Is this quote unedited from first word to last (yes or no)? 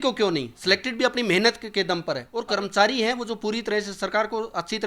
no